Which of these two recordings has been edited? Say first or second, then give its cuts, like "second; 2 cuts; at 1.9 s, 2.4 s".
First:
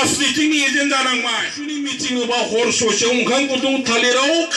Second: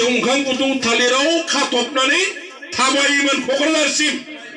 first; 1 cut; at 1.6 s